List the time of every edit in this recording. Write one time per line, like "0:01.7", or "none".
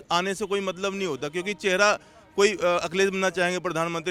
none